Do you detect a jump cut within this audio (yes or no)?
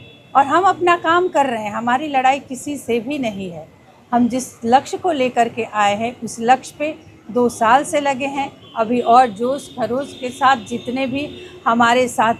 no